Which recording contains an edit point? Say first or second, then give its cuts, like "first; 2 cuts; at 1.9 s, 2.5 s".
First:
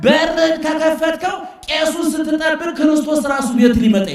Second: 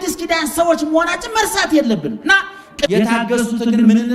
second; 1 cut; at 2.9 s